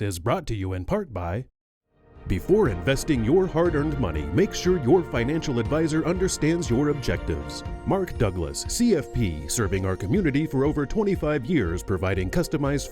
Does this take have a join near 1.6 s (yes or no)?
yes